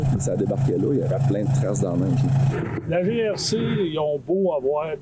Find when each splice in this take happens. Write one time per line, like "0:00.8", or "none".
0:02.5